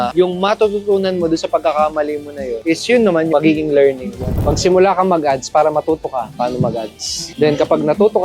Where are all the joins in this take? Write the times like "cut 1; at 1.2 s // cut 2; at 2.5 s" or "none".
cut 1; at 3.3 s // cut 2; at 4.3 s // cut 3; at 7.2 s